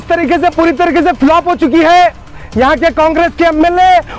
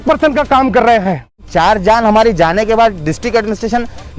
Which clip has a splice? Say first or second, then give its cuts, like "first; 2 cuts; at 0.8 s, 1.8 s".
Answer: second; 1 cut; at 1.5 s